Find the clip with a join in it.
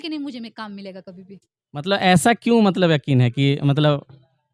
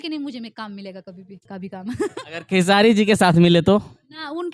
second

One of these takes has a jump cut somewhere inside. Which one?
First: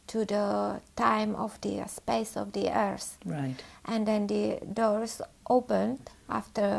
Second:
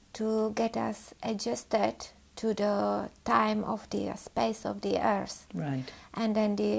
second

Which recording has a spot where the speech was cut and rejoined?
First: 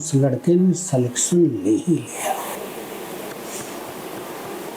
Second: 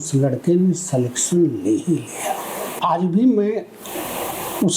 second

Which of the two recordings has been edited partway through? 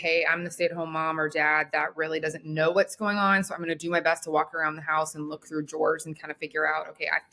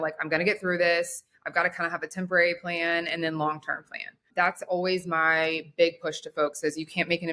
second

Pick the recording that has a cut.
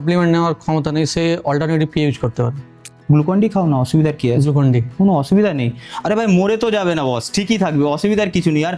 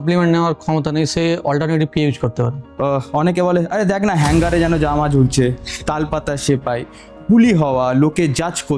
second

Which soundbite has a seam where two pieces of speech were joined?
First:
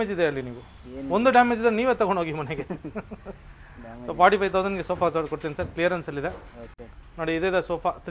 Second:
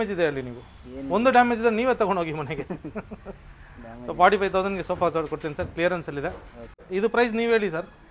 second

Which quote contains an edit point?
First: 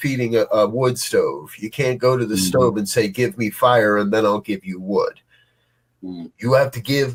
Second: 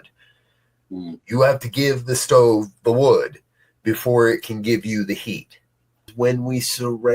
second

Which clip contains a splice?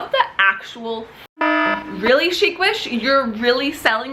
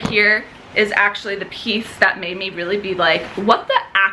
first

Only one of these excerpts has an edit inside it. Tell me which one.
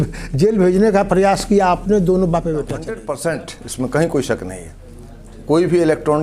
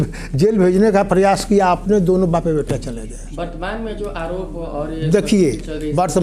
first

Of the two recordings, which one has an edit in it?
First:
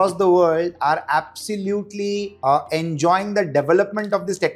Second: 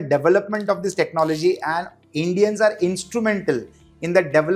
first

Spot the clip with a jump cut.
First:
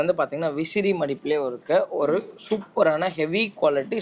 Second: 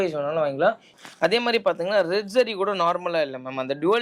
second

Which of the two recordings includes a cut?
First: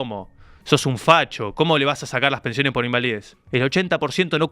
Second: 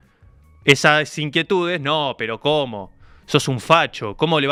first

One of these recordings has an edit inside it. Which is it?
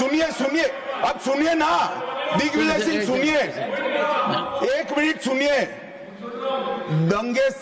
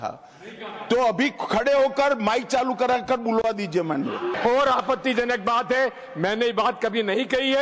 second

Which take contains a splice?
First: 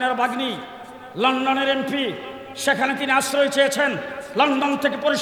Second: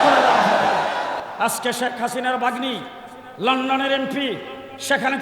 second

